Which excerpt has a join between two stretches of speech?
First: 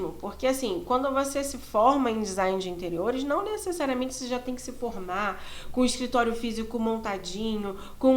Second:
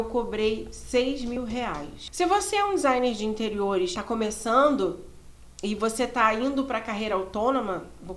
second; 2 cuts; at 1.6 s, 4.0 s

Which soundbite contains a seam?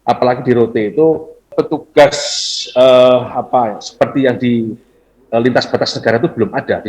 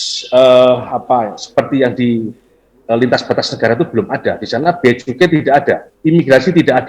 first; 1 cut; at 1.5 s

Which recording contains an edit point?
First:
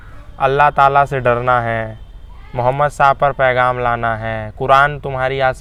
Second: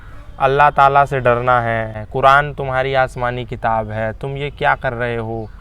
second; 1 cut; at 2.0 s

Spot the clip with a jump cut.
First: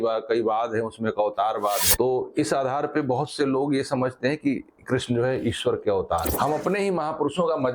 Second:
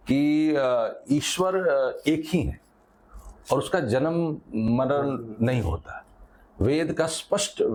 first; 1 cut; at 6.3 s

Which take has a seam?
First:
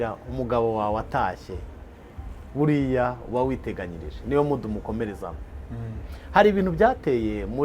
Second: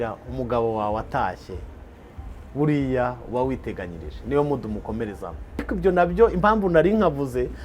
second; 1 cut; at 5.7 s

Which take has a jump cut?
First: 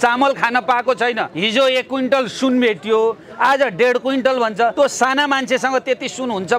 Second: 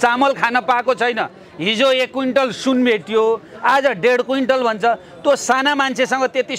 first; 2 cuts; at 1.3 s, 4.7 s

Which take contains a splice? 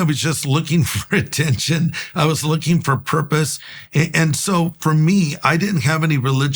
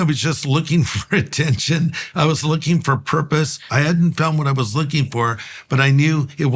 second; 1 cut; at 3.6 s

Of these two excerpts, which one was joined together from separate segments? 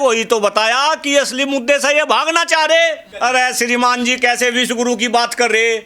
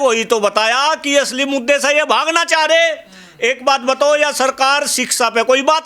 first; 1 cut; at 3.1 s

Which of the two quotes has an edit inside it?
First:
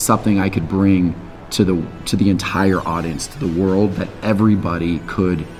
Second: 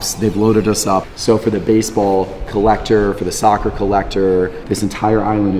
second; 2 cuts; at 1.1 s, 4.6 s

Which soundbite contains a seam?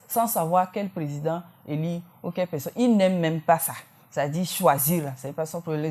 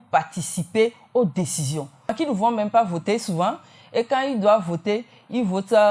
second; 1 cut; at 2.2 s

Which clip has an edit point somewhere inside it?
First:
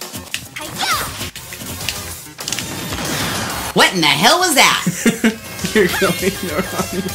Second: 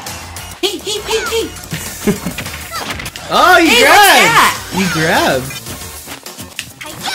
first; 1 cut; at 2.5 s

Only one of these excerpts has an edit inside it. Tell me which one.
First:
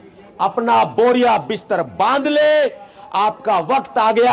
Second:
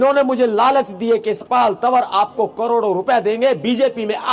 second; 1 cut; at 1.4 s

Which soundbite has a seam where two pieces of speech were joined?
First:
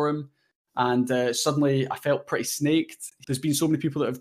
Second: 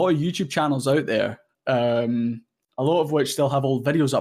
first; 1 cut; at 3.2 s

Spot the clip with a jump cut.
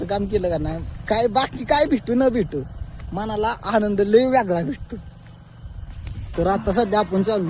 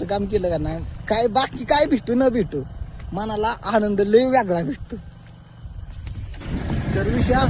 second; 1 cut; at 6.4 s

